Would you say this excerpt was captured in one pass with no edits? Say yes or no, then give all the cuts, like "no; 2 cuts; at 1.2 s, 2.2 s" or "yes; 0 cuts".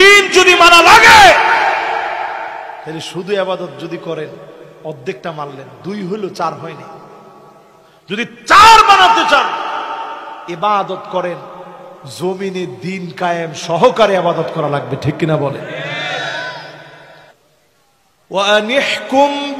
no; 1 cut; at 17.4 s